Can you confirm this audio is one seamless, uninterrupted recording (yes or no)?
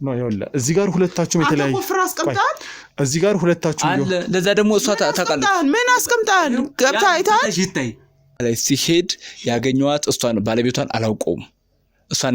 no